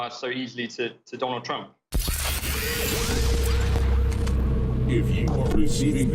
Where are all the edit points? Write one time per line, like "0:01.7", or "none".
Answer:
0:02.2